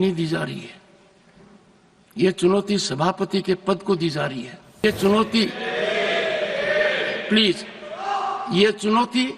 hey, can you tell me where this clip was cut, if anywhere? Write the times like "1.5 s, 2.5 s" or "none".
4.8 s